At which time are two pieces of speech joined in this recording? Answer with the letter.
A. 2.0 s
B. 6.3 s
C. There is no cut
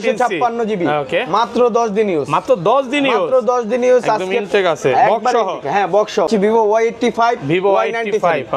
B